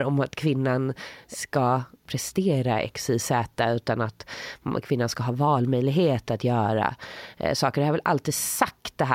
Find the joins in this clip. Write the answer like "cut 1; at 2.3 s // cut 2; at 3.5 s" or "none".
cut 1; at 1.3 s // cut 2; at 2.1 s